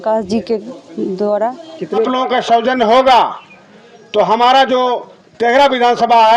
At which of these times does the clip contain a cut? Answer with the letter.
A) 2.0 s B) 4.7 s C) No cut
A